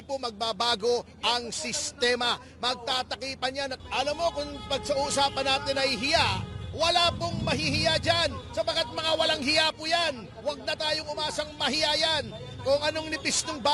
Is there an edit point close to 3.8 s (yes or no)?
yes